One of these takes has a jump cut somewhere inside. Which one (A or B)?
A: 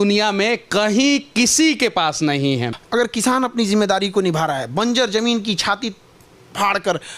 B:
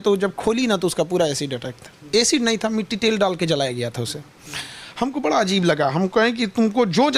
A